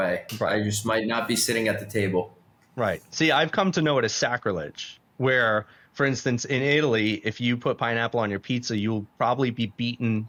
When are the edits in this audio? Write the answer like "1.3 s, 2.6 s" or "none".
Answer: none